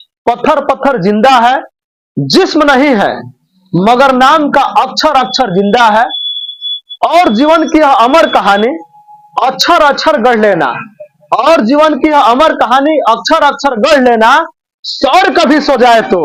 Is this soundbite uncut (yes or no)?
yes